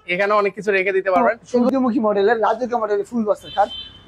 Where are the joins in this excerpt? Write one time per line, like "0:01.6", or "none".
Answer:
0:01.6